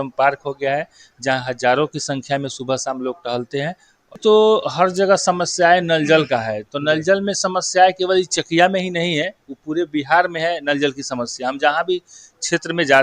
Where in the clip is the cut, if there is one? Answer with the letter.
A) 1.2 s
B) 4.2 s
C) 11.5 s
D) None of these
B